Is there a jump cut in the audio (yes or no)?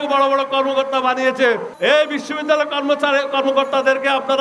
yes